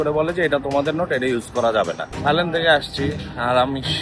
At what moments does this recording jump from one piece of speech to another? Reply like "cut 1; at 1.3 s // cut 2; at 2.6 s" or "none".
cut 1; at 2.1 s